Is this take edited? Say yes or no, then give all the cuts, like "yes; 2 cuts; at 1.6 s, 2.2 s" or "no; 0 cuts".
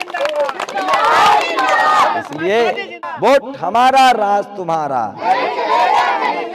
yes; 1 cut; at 3.1 s